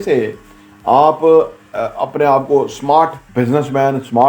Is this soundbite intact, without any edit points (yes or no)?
no